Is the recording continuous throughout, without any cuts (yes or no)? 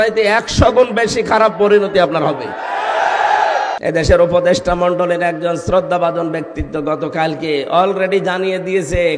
no